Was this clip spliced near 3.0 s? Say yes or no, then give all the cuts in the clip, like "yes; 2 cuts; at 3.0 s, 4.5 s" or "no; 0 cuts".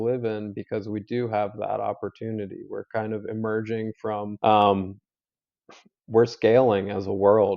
no; 1 cut; at 4.3 s